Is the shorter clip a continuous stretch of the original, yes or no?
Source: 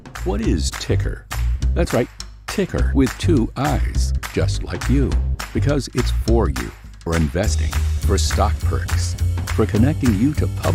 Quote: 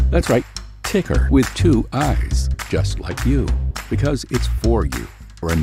yes